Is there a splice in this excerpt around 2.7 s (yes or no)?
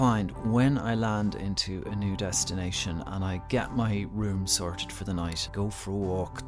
no